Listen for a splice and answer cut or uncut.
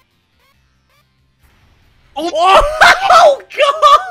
uncut